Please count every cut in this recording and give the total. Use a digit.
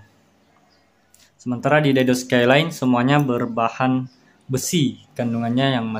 1